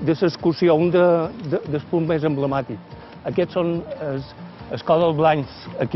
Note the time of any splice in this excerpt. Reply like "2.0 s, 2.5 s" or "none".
none